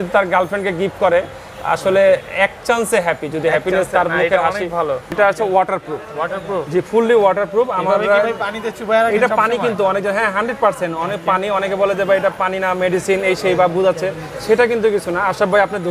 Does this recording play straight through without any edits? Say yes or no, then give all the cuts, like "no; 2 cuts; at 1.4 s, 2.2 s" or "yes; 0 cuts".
no; 1 cut; at 5.1 s